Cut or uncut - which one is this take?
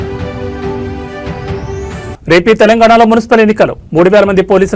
cut